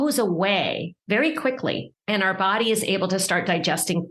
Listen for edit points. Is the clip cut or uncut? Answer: cut